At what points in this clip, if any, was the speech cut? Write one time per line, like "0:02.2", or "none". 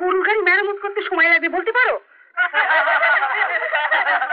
none